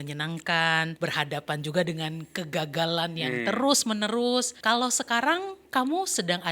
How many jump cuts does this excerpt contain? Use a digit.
2